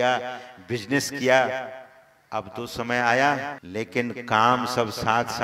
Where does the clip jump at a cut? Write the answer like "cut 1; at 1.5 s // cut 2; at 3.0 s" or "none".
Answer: cut 1; at 3.6 s